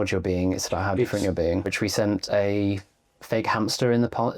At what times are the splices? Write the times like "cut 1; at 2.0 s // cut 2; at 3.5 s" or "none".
cut 1; at 1.7 s